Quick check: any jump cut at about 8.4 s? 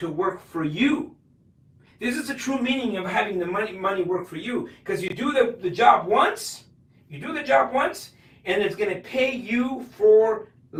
no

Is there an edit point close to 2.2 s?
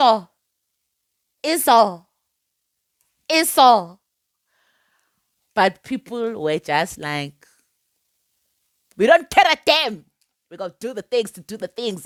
no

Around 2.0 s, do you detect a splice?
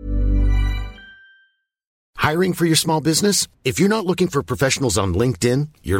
yes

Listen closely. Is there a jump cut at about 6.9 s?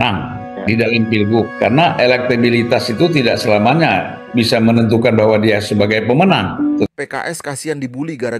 yes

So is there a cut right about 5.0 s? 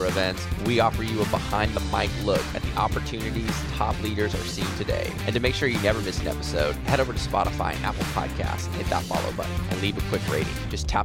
no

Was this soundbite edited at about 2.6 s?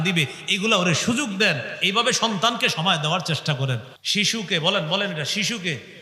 no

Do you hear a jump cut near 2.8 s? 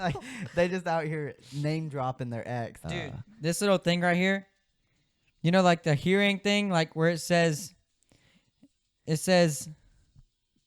yes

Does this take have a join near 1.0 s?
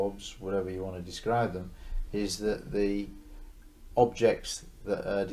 no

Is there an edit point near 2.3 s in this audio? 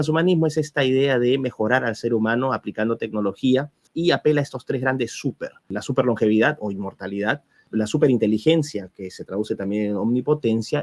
no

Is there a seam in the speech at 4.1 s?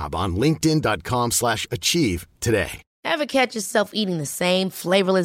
no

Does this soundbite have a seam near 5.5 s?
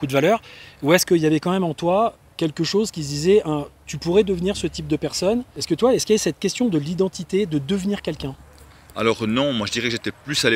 yes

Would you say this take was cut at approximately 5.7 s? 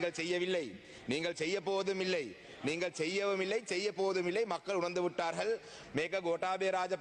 yes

